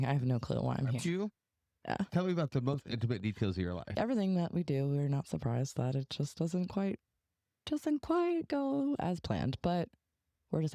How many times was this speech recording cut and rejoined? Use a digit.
2